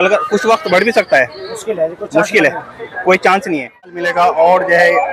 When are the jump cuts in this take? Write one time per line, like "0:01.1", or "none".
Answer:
0:04.0